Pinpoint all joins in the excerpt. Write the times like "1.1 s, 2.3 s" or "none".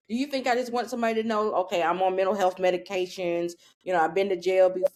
none